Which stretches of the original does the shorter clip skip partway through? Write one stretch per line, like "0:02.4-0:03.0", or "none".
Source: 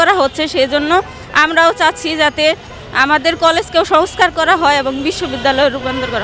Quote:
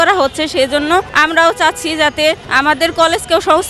0:01.1-0:01.3
0:02.7-0:02.9